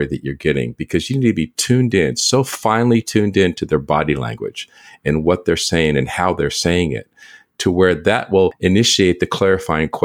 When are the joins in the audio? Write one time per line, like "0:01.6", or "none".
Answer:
0:08.6